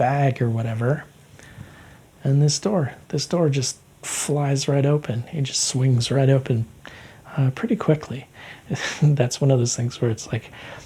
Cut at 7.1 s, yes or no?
no